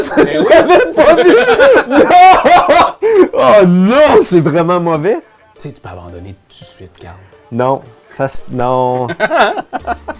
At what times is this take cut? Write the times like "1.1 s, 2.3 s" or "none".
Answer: 5.4 s